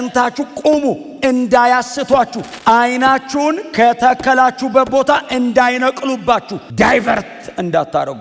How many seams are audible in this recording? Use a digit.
1